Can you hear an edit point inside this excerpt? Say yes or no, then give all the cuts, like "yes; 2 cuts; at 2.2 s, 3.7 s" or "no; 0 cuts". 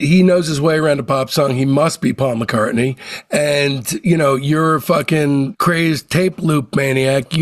no; 0 cuts